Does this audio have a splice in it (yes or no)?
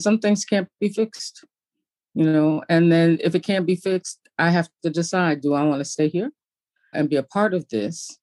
yes